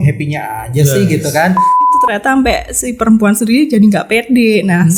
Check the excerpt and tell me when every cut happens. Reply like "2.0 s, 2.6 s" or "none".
2.0 s